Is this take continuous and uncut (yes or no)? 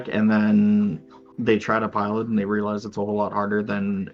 yes